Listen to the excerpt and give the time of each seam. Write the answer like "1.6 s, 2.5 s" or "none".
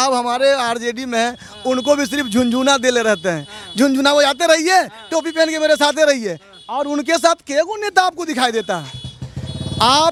none